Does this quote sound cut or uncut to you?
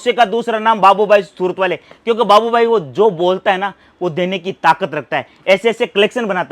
uncut